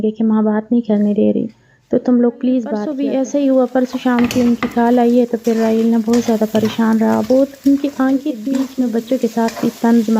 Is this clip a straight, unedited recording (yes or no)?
no